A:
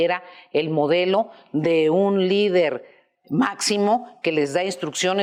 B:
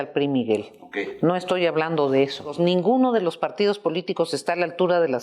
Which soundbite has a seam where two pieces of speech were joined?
B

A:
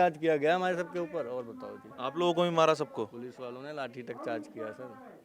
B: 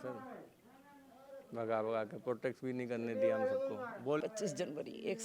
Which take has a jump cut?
B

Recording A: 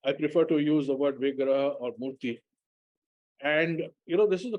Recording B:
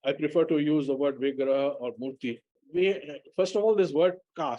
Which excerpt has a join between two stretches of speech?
B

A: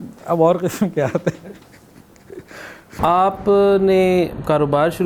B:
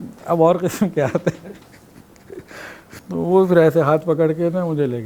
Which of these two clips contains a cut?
A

